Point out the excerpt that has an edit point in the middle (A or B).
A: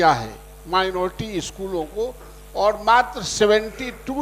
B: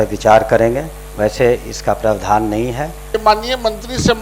B